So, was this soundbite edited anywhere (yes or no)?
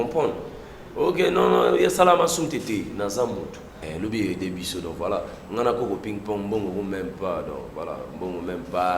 yes